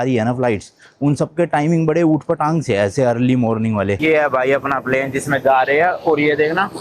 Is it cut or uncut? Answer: cut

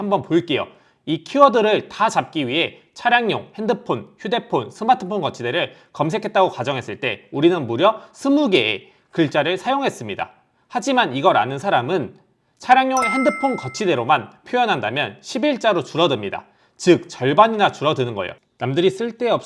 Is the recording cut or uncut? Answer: uncut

